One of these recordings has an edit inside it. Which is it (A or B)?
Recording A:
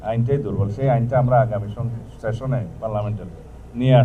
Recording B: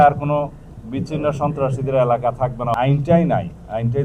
B